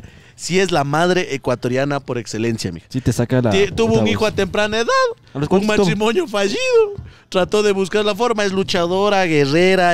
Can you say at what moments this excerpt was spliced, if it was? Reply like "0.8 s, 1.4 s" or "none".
none